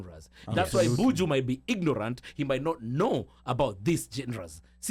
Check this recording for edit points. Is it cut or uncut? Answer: uncut